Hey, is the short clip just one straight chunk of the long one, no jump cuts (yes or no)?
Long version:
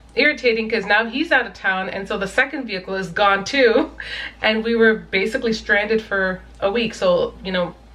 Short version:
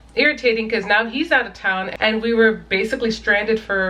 no